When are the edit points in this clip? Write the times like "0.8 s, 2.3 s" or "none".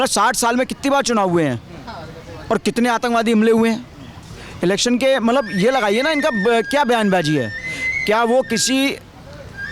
none